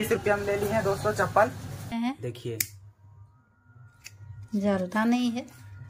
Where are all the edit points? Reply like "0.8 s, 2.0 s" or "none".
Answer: 1.9 s